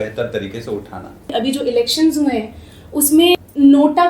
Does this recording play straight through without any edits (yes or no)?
no